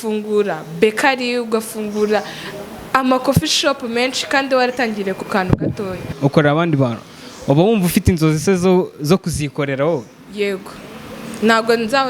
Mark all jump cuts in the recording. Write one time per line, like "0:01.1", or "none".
0:06.1